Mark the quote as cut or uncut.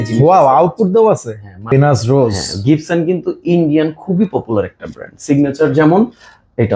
cut